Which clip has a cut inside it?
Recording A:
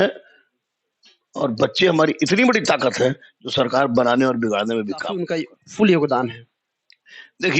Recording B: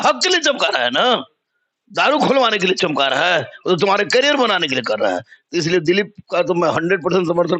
A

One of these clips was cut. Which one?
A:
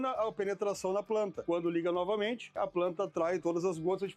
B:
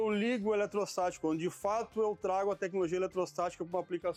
A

